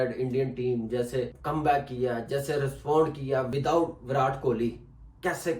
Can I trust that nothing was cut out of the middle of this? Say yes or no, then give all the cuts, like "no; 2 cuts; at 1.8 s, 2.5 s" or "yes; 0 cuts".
no; 2 cuts; at 1.4 s, 3.5 s